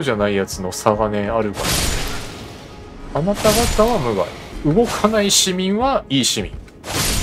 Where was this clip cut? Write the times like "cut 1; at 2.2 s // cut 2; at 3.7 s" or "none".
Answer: cut 1; at 4.4 s